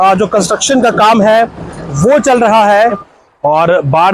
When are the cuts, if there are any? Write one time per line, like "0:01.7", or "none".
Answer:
0:03.1